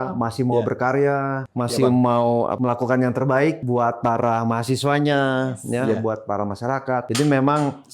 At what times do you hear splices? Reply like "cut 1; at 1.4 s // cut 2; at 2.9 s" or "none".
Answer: cut 1; at 1.4 s // cut 2; at 2.5 s // cut 3; at 3.6 s // cut 4; at 7.1 s